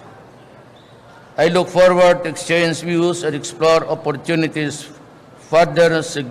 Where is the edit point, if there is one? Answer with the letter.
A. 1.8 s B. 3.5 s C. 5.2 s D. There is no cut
B